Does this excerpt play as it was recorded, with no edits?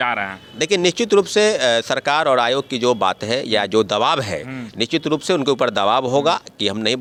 yes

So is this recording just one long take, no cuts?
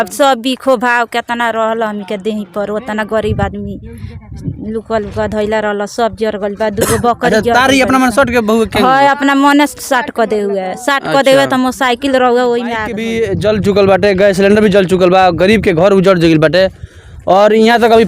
no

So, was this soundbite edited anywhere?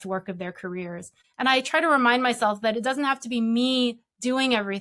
yes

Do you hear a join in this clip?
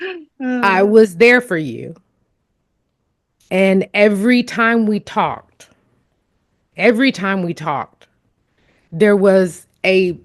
no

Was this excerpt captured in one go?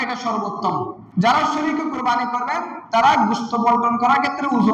no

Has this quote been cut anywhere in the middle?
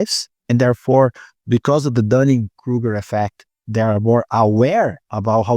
no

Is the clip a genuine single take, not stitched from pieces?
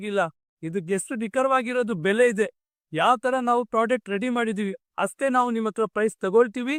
yes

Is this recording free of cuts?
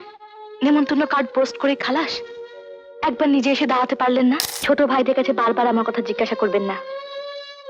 no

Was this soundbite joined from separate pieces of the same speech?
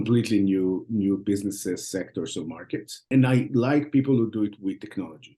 yes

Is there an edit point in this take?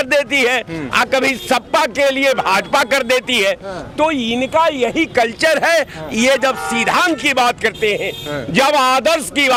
no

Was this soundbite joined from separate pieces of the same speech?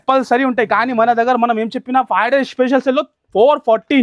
no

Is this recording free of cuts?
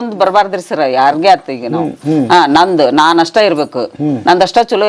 yes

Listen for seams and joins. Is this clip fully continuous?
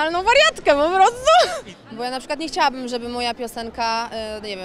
no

